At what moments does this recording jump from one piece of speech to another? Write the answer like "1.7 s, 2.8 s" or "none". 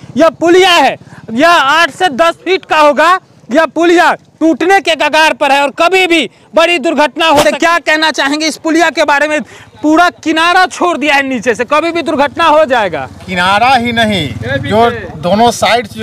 7.4 s